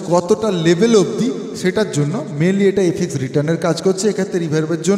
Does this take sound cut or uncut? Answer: uncut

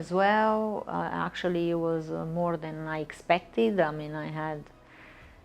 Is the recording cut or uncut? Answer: uncut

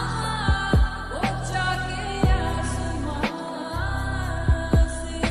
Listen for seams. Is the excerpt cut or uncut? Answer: uncut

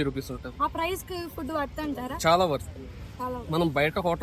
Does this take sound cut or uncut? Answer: uncut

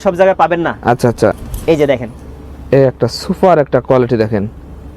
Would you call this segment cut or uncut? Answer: cut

